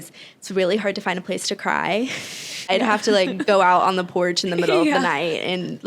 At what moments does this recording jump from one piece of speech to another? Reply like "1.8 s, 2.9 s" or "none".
2.7 s